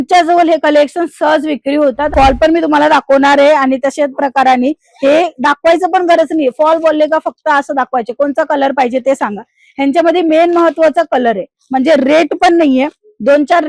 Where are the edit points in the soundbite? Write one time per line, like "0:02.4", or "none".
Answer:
0:02.0

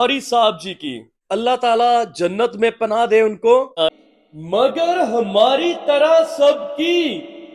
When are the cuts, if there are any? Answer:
0:03.9

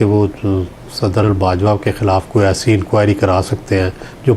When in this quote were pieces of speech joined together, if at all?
0:01.2

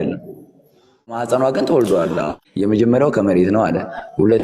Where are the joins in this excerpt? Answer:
0:01.2
0:02.4

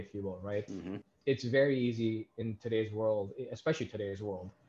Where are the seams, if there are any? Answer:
none

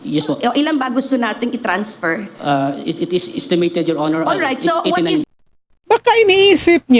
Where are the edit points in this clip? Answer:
0:05.4

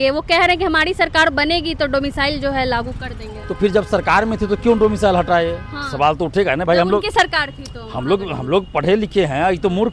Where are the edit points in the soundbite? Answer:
none

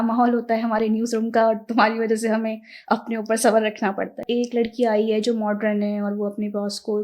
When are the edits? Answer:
0:04.2

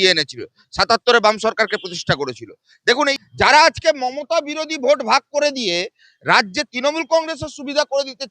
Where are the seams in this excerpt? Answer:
0:03.0

